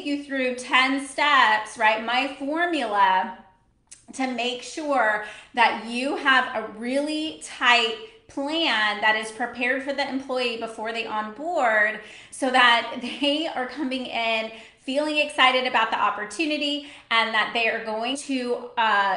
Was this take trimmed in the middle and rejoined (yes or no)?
yes